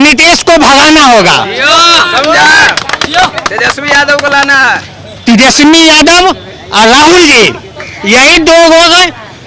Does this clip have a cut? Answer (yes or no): no